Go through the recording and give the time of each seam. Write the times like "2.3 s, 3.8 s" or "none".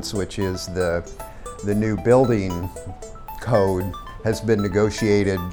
4.0 s